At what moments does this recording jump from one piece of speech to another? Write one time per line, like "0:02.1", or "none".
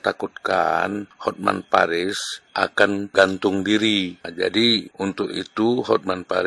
0:01.1
0:02.7
0:04.3
0:04.9

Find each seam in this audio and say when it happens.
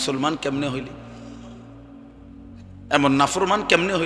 0:00.9
0:02.8

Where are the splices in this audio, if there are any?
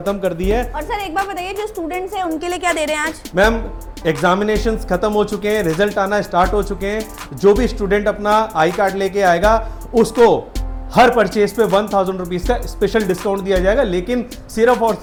none

